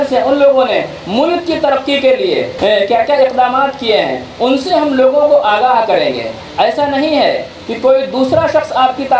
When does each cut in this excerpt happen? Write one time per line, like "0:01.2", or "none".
0:02.5